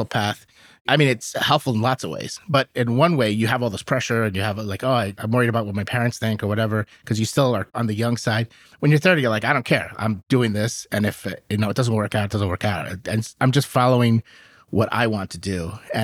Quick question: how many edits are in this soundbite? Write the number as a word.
zero